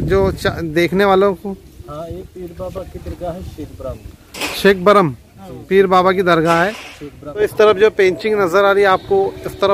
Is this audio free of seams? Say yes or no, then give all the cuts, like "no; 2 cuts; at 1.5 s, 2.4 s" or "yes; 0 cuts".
no; 1 cut; at 7.3 s